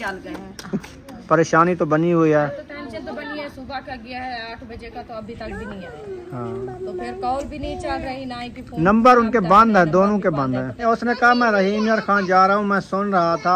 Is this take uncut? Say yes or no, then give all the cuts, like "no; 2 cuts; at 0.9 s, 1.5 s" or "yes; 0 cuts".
no; 3 cuts; at 1.1 s, 6.3 s, 10.8 s